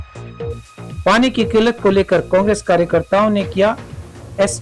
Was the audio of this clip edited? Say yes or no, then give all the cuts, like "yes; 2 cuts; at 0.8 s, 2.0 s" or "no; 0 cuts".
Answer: yes; 1 cut; at 1.0 s